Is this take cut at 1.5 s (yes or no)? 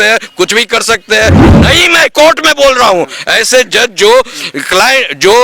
yes